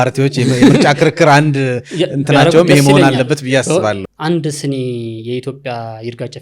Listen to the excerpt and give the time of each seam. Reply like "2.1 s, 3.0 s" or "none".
4.1 s